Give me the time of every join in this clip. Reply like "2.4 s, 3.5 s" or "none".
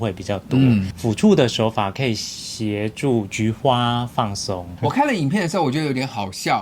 0.9 s, 4.7 s